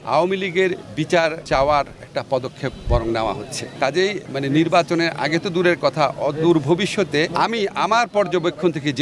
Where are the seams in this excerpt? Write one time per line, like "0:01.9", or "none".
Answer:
none

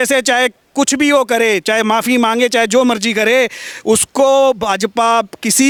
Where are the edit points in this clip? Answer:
none

